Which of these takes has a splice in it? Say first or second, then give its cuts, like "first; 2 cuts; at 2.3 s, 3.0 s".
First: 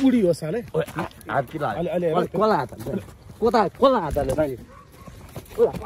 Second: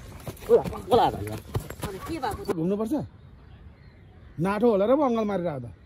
second; 1 cut; at 2.5 s